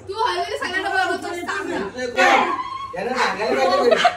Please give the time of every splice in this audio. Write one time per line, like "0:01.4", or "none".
0:02.2